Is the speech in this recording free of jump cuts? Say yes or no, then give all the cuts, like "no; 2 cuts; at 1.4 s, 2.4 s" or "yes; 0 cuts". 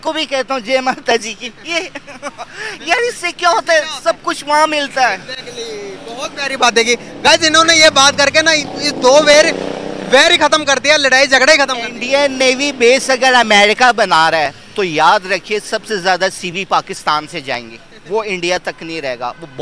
yes; 0 cuts